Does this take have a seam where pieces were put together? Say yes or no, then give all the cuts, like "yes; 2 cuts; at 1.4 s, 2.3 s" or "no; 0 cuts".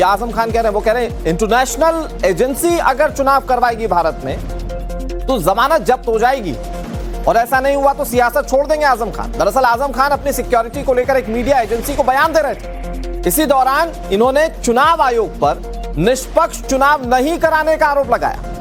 no; 0 cuts